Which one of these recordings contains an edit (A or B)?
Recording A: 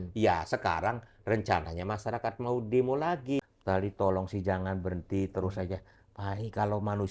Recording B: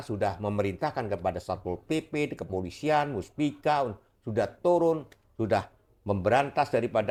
A